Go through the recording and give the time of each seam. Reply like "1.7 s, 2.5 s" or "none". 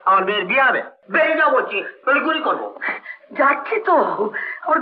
1.0 s